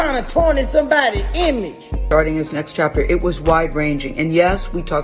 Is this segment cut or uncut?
cut